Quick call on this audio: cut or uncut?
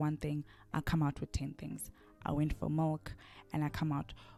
uncut